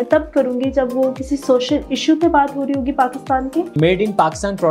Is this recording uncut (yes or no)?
no